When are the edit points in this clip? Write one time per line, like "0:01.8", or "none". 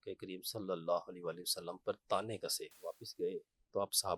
0:02.7